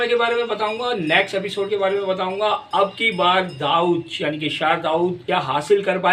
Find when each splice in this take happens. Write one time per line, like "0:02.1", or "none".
0:05.2